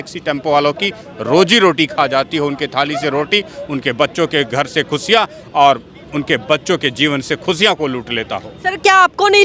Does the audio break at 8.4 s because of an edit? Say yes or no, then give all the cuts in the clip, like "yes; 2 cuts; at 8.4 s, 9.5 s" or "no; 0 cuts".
no; 0 cuts